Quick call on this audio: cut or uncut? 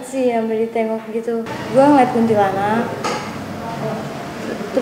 cut